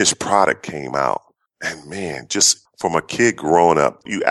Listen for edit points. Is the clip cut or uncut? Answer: uncut